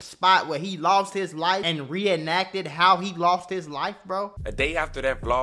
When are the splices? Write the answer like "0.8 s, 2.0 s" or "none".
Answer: 1.7 s, 4.4 s